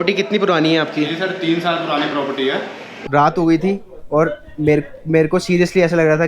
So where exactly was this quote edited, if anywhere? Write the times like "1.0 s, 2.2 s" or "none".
2.9 s

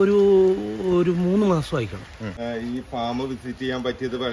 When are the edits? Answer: 2.4 s

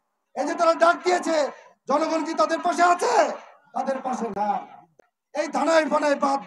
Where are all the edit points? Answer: 4.9 s

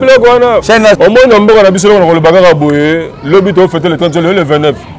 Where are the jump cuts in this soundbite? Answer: 1.0 s

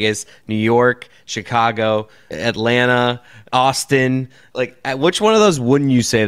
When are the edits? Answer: 2.2 s, 3.4 s, 4.4 s

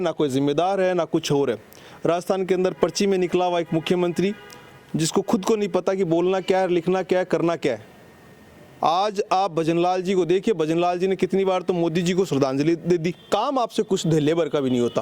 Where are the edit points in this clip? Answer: 13.2 s

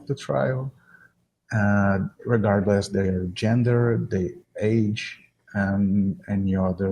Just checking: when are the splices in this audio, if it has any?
none

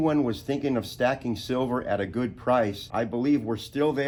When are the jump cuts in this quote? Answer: none

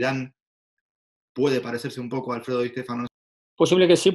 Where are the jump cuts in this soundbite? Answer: 3.2 s

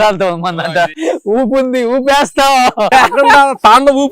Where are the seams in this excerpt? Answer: 0.9 s, 2.9 s

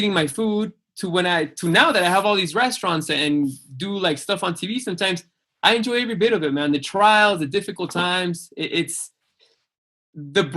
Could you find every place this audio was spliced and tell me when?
none

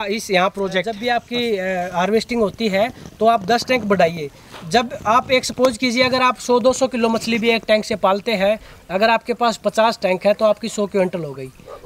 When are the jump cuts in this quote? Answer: 0.9 s

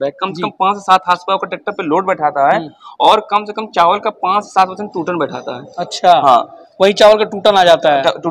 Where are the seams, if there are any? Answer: none

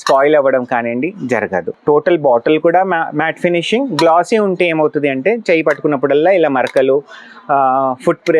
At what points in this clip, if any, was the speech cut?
1.7 s

